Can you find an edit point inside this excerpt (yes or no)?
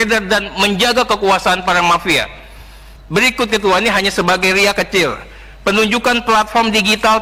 no